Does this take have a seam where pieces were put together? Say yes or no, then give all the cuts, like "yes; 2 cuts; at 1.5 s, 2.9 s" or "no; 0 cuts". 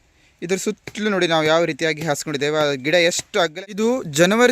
yes; 1 cut; at 3.5 s